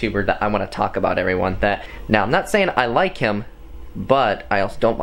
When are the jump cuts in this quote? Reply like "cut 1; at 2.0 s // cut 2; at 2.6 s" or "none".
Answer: cut 1; at 1.9 s